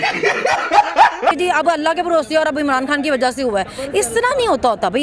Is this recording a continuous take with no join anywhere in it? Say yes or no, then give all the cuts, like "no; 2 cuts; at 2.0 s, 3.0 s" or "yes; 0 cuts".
no; 1 cut; at 1.3 s